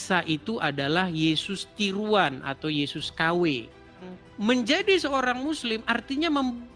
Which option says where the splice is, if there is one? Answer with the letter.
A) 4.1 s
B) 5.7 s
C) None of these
A